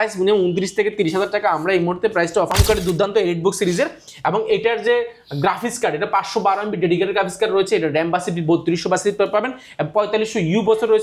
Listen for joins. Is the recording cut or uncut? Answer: cut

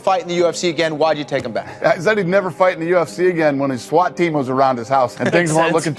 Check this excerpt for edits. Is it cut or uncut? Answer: uncut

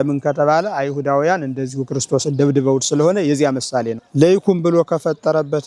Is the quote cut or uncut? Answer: cut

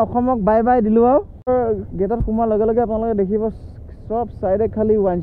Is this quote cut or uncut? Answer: cut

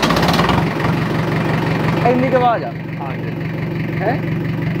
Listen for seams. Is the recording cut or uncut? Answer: uncut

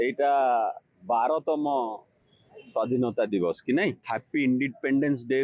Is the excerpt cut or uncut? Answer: cut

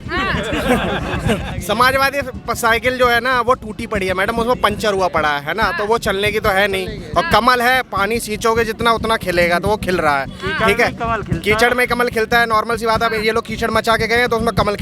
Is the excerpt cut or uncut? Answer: cut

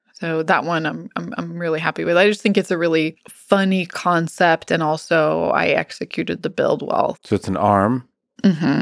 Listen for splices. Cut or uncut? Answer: cut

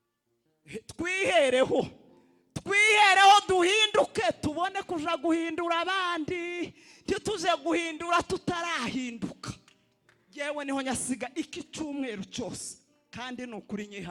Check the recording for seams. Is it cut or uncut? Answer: uncut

